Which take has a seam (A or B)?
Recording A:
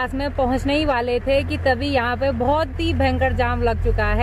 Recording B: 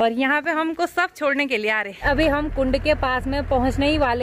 B